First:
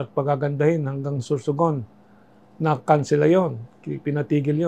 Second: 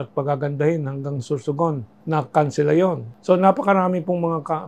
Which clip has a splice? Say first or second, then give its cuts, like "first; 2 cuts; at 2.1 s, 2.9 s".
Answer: second; 2 cuts; at 1.9 s, 3.1 s